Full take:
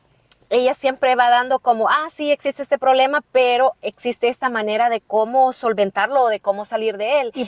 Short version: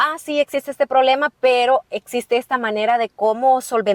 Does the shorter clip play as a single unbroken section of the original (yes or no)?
yes